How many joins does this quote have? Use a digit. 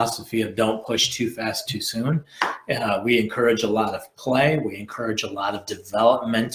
0